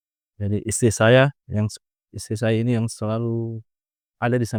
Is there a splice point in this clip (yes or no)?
no